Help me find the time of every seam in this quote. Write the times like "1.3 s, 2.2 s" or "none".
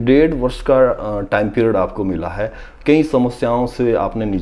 none